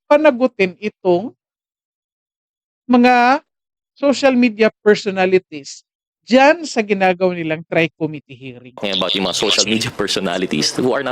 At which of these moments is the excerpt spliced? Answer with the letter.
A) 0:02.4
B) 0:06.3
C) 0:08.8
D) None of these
C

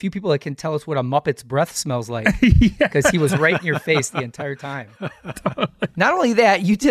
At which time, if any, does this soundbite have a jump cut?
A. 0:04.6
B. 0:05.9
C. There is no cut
B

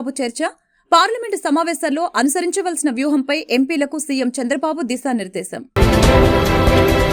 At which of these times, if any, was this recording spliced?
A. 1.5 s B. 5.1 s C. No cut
C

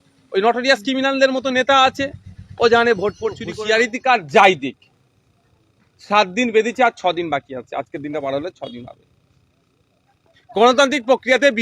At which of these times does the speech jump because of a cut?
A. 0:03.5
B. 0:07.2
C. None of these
A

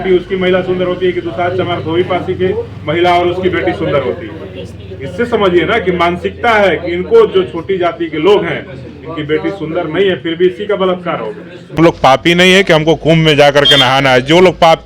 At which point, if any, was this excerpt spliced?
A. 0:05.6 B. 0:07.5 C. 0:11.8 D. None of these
C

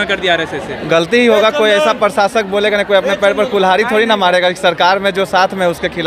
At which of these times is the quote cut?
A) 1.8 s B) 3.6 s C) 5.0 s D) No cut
D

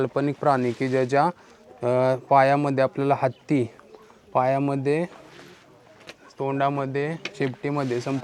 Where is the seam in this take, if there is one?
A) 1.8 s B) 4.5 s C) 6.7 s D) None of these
D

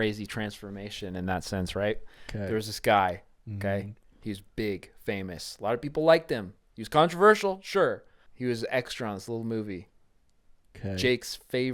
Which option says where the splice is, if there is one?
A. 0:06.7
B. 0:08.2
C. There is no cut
B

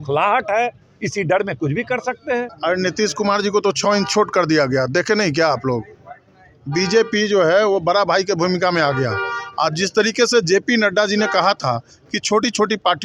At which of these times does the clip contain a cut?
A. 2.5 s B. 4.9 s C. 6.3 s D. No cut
A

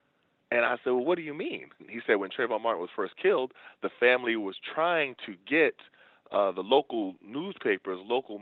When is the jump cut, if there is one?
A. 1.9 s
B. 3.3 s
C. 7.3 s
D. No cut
A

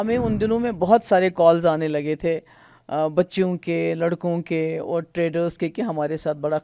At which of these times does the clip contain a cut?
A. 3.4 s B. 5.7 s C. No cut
C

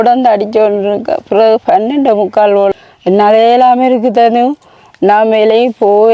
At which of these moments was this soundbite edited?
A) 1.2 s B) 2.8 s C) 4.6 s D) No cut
B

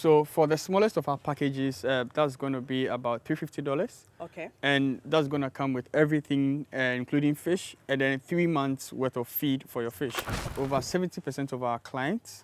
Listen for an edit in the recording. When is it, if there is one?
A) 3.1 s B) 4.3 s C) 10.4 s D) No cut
C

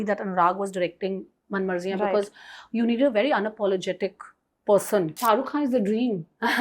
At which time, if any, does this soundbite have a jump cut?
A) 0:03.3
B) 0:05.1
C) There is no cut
B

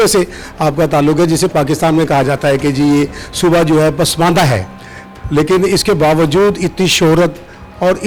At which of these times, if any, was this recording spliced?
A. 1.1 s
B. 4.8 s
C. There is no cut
C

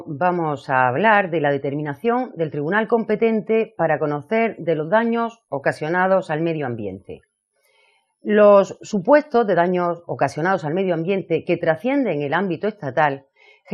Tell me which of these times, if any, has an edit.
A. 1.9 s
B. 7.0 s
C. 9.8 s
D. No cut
A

